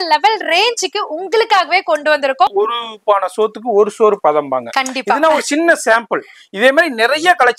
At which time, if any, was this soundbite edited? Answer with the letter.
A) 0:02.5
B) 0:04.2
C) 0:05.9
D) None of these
A